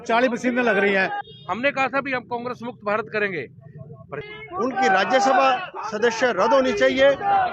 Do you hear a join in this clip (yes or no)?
yes